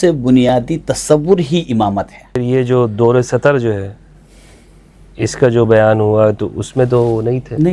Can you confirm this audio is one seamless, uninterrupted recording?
no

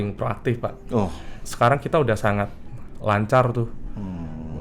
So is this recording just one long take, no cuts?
no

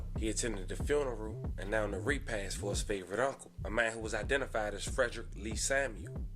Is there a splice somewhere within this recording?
no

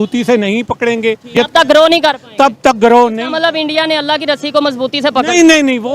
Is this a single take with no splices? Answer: no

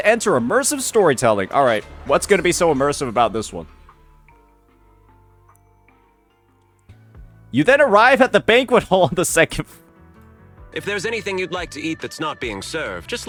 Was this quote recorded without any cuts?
yes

